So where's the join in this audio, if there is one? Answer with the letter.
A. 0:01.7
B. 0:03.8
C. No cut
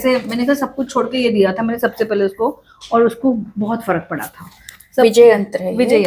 C